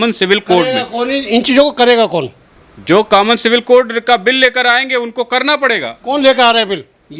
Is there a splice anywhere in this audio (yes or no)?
no